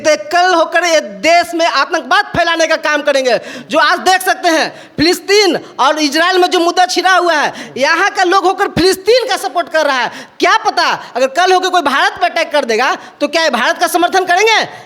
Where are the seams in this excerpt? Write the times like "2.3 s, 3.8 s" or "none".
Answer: none